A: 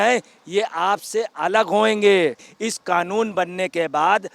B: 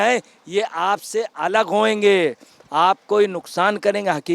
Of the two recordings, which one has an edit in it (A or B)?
A